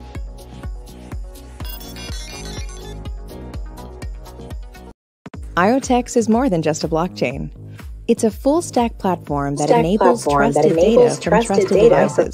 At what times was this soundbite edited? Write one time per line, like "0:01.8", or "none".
0:04.9